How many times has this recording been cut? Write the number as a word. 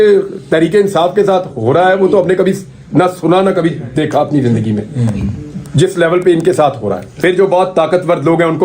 one